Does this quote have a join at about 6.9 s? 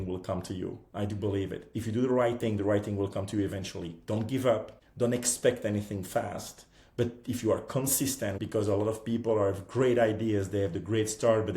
no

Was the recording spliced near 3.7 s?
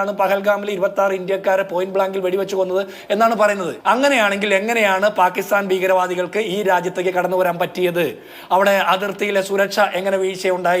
yes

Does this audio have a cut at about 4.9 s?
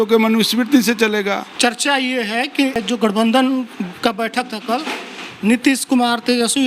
no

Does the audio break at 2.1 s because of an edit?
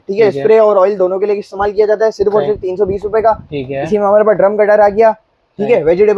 no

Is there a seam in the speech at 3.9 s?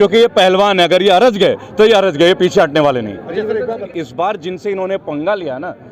yes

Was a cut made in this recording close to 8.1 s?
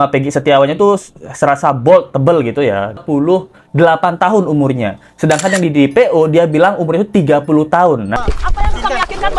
yes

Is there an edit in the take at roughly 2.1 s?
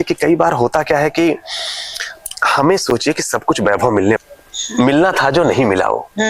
no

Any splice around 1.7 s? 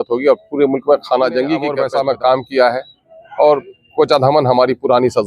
yes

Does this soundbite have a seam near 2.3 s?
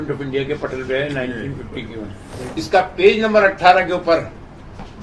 yes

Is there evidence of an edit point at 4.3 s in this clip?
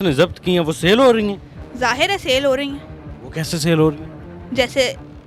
no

